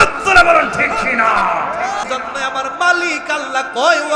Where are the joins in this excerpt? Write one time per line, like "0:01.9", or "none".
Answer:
0:02.0